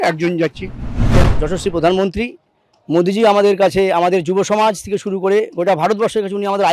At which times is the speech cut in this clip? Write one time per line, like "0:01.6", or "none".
0:01.2

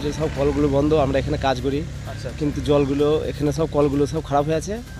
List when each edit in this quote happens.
none

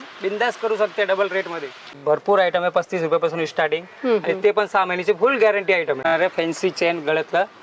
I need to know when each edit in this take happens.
0:02.0
0:06.1

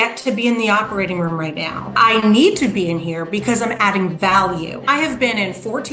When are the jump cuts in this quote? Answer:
0:01.9
0:04.8

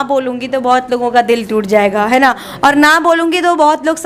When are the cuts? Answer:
none

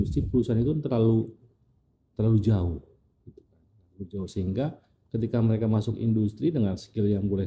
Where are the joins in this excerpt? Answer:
none

